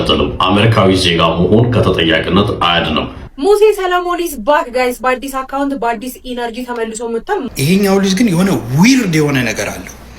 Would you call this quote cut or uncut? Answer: cut